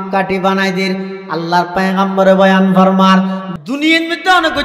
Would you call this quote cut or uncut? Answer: cut